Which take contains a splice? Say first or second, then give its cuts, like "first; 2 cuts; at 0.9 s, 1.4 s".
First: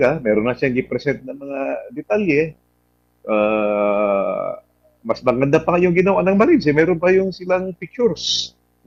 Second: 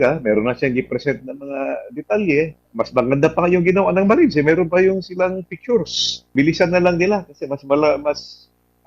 second; 2 cuts; at 2.6 s, 6.3 s